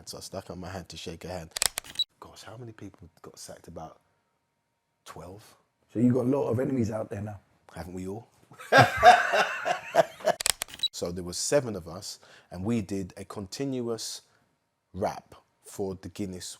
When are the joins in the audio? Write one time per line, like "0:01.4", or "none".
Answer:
0:01.9
0:10.8